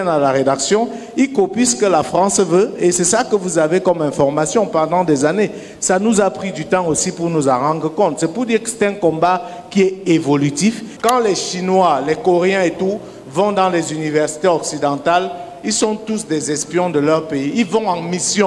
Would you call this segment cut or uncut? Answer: cut